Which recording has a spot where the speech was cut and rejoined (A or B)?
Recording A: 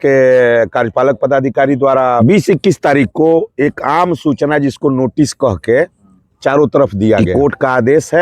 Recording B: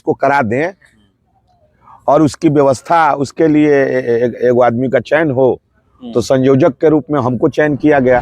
A